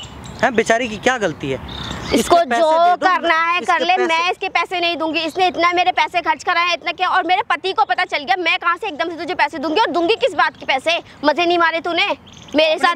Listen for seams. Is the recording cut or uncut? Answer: uncut